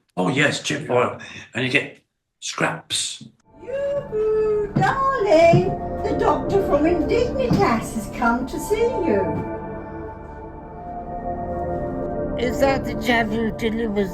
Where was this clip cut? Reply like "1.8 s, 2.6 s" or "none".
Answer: 3.5 s